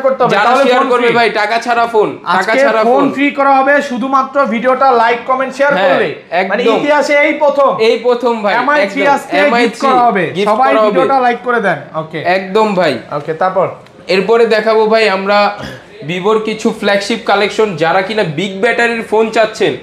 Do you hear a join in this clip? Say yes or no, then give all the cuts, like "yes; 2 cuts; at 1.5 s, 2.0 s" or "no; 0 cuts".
no; 0 cuts